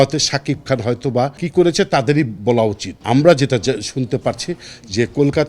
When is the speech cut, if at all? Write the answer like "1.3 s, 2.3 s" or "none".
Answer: 1.4 s, 2.9 s